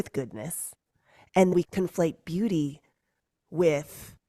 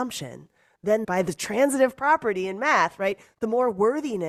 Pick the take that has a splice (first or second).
first